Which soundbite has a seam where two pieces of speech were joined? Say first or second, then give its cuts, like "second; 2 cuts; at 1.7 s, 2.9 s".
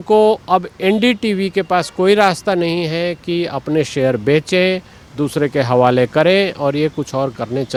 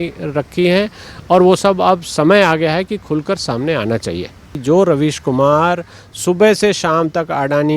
second; 1 cut; at 4.5 s